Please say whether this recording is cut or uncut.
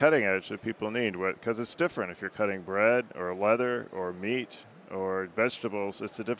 uncut